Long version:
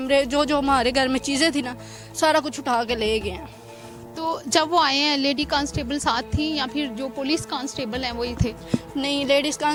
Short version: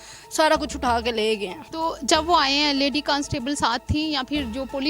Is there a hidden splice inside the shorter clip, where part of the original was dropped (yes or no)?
yes